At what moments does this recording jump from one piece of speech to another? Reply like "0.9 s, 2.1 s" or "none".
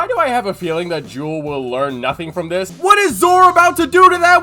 2.7 s

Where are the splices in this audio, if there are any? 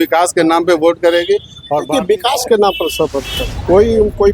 1.8 s

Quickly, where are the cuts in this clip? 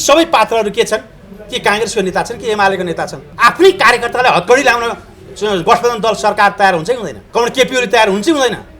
3.2 s, 7.1 s

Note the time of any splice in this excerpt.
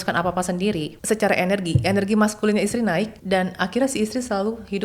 0.9 s, 3.2 s

